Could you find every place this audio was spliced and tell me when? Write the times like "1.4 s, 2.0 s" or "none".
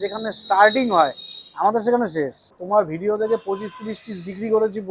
2.5 s